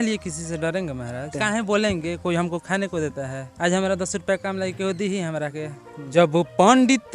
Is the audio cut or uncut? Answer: cut